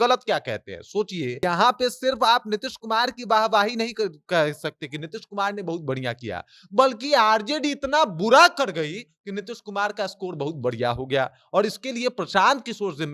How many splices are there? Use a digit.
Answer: 1